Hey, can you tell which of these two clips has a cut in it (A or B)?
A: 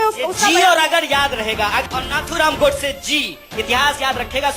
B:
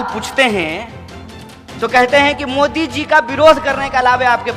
A